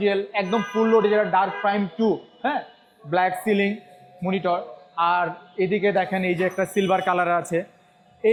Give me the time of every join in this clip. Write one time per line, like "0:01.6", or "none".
none